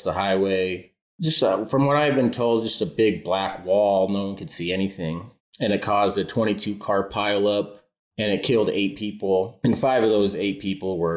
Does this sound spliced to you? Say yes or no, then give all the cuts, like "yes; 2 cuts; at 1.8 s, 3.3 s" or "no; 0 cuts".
yes; 1 cut; at 9.5 s